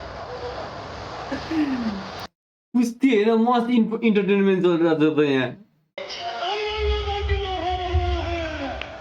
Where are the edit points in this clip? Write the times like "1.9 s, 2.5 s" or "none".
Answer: 1.3 s, 6.1 s